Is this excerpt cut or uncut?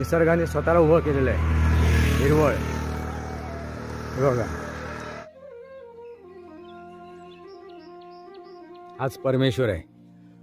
cut